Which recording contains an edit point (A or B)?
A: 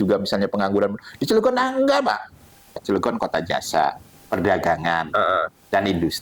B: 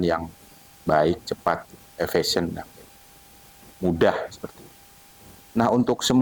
A